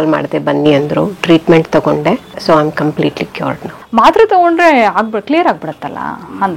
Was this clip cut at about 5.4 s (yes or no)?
no